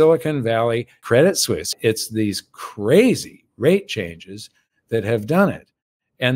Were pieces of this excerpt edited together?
yes; 2 cuts; at 1.0 s, 1.7 s

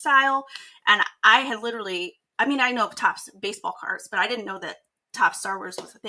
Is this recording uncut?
yes; 0 cuts

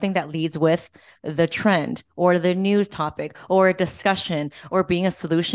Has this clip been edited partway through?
no; 0 cuts

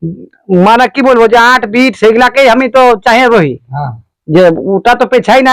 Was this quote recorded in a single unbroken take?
yes; 0 cuts

